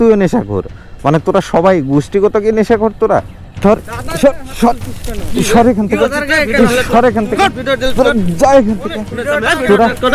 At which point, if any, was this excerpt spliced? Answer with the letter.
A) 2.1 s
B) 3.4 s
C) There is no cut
B